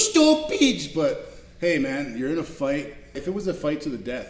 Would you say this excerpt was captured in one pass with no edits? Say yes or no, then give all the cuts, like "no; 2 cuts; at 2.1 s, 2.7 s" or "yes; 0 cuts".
no; 1 cut; at 3.2 s